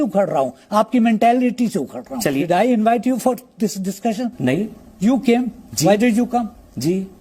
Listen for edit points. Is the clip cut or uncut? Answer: cut